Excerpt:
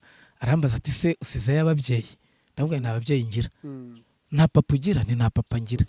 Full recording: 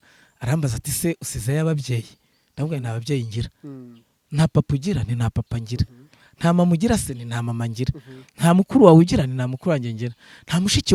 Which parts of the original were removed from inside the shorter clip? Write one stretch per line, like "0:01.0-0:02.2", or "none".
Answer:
none